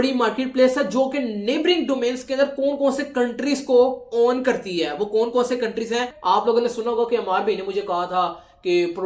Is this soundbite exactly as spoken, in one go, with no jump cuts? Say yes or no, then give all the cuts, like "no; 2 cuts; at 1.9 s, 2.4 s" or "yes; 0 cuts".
no; 1 cut; at 6.1 s